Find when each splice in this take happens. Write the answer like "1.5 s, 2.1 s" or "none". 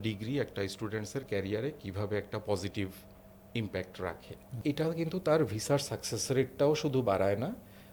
4.6 s